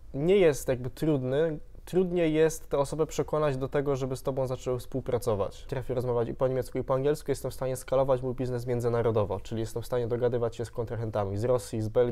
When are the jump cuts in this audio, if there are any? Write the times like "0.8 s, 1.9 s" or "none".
5.7 s